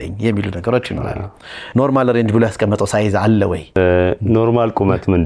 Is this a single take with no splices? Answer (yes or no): no